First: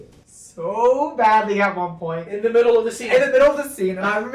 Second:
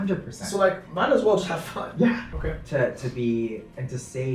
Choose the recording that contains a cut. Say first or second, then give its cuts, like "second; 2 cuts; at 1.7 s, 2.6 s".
second; 1 cut; at 2.3 s